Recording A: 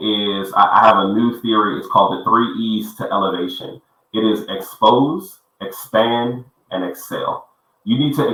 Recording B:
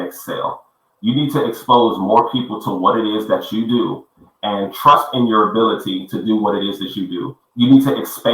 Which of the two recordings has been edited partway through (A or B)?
B